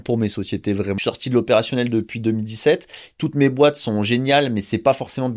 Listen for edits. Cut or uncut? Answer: cut